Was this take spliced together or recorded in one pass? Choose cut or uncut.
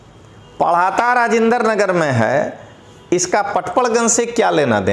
uncut